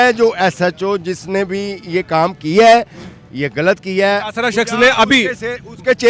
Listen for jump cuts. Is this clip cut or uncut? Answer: uncut